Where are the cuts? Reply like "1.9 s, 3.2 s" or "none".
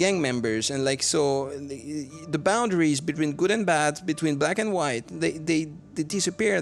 none